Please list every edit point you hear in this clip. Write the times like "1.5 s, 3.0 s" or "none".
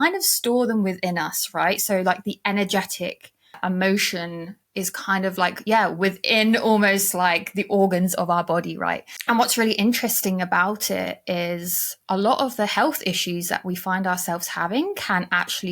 9.1 s